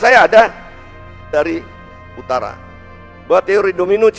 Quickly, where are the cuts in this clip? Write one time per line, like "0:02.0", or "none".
0:01.2